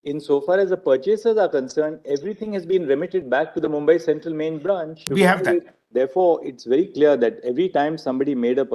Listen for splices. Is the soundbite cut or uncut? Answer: cut